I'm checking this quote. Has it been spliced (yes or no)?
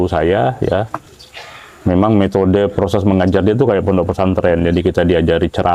no